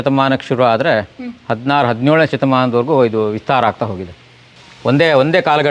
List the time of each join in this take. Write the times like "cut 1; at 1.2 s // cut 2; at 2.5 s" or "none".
none